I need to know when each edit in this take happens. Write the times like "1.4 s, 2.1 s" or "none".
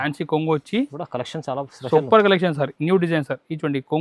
2.7 s